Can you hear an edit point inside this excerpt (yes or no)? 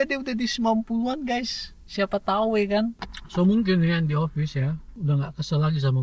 yes